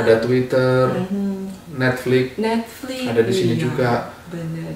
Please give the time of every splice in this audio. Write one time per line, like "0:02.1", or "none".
none